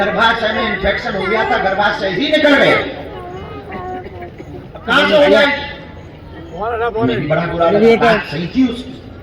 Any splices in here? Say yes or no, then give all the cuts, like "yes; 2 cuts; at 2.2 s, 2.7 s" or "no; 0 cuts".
no; 0 cuts